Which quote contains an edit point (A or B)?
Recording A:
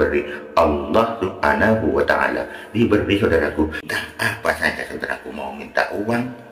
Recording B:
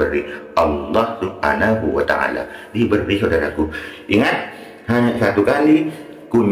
A